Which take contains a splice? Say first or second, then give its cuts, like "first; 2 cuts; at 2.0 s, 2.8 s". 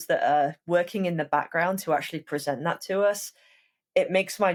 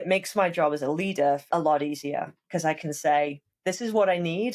second; 1 cut; at 1.4 s